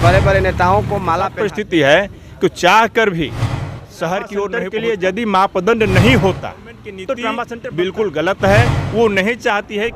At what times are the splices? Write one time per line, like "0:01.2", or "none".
0:01.4
0:04.6
0:07.5